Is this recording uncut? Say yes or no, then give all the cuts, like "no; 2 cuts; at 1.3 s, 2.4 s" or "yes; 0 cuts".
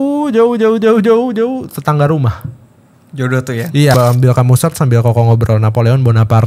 no; 1 cut; at 3.9 s